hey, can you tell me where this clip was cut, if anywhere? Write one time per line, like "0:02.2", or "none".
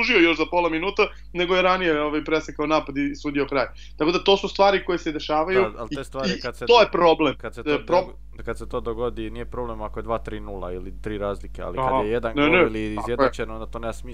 none